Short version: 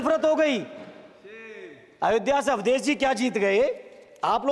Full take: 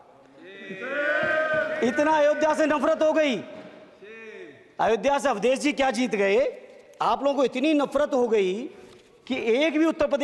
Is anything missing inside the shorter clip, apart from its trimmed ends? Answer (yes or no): no